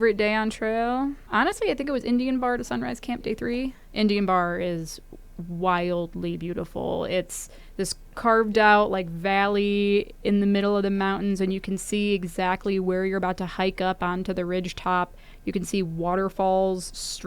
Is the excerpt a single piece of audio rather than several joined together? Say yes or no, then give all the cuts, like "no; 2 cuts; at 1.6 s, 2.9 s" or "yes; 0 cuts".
no; 2 cuts; at 1.2 s, 3.8 s